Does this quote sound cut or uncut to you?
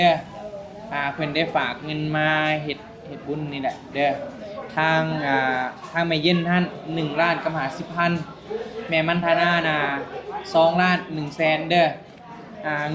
uncut